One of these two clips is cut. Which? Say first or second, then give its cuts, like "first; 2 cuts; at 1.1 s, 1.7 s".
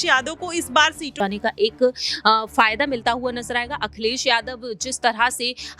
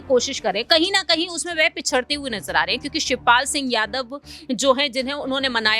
first; 1 cut; at 1.1 s